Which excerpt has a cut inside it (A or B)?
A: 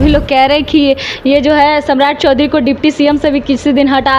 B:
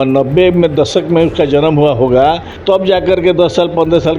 B